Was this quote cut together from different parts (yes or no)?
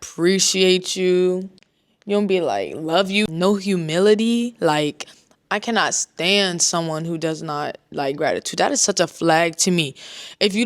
no